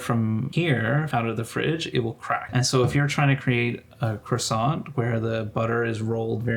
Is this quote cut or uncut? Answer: cut